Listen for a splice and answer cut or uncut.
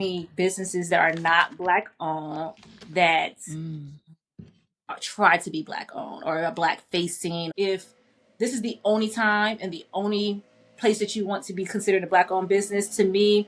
cut